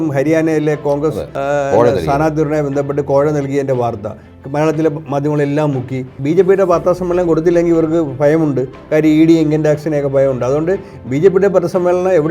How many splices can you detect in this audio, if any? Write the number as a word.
two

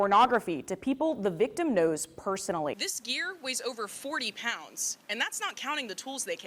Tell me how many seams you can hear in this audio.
one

